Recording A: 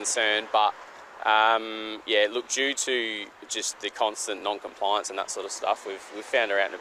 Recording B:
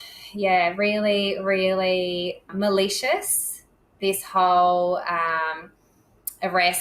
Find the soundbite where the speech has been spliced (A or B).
B